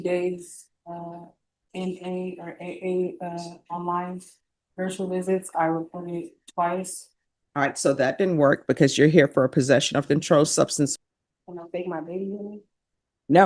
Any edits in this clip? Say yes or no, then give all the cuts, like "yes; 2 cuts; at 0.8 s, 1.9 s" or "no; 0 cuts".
yes; 1 cut; at 10.9 s